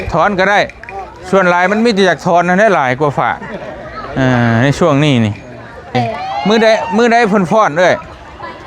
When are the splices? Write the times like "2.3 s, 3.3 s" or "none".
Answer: 5.9 s

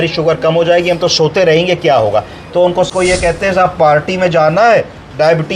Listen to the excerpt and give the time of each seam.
2.9 s

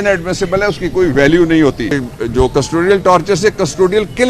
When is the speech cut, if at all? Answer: 2.1 s

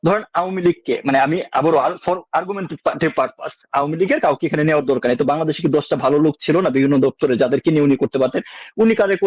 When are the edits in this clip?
none

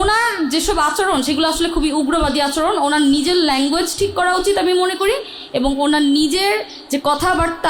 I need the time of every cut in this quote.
none

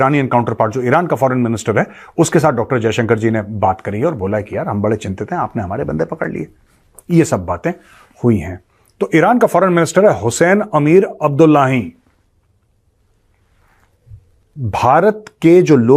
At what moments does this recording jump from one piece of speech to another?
none

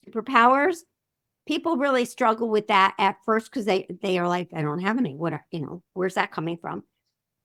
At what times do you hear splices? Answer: none

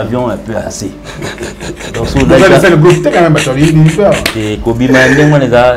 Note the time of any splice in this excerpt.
none

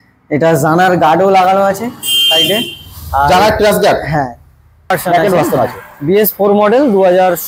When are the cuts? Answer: 5.0 s

